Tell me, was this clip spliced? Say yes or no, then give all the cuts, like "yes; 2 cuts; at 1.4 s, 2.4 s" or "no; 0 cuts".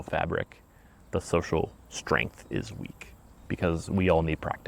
no; 0 cuts